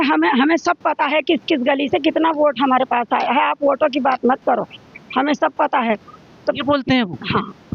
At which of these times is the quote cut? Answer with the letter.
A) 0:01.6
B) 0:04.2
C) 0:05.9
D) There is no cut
D